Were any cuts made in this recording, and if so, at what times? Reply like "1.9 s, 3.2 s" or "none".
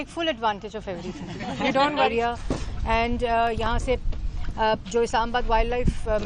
2.1 s